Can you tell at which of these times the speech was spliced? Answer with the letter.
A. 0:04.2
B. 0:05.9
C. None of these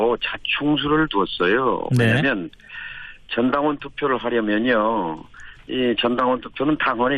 B